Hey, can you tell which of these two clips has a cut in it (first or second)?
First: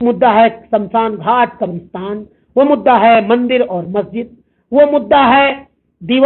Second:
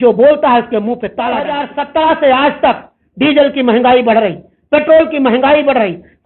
second